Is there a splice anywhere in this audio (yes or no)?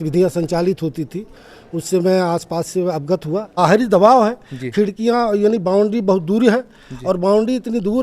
yes